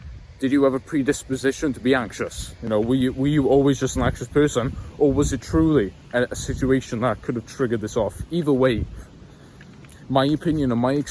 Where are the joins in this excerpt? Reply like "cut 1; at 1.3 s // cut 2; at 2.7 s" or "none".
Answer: cut 1; at 2.7 s